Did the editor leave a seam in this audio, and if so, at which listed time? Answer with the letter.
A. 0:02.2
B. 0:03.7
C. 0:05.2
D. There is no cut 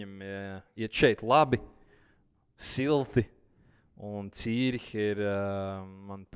D